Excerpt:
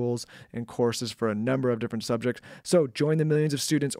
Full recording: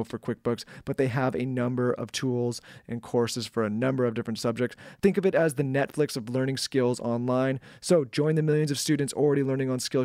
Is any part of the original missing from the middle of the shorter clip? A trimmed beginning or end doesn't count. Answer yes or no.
yes